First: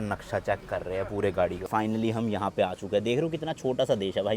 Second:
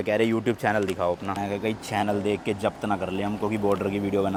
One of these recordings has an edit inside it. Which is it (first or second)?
first